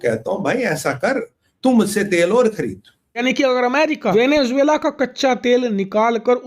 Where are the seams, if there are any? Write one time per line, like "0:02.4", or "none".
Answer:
0:03.2